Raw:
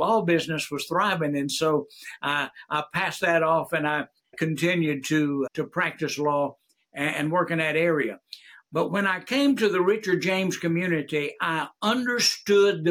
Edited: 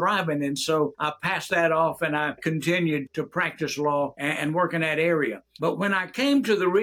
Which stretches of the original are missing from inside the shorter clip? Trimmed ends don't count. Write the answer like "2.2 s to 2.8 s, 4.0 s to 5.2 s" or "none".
1.9 s to 2.7 s, 4.1 s to 4.3 s, 5.0 s to 5.5 s, 6.6 s to 6.9 s, 8.2 s to 8.6 s